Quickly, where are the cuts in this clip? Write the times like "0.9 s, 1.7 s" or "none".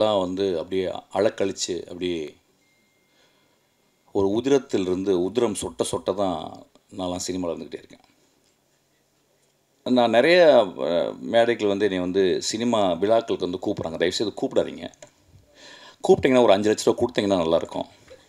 8.6 s